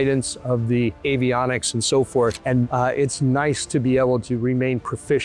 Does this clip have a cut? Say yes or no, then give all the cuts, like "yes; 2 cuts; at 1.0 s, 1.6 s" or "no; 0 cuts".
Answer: yes; 1 cut; at 2.7 s